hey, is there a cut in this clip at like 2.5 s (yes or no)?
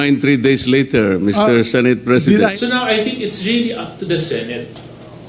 yes